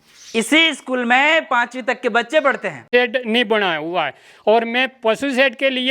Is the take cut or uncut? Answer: cut